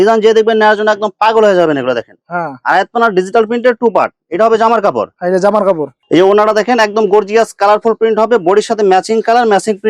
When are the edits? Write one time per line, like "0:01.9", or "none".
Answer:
none